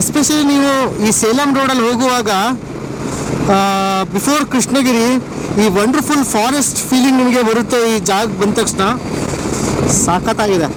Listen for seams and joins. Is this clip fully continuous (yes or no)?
yes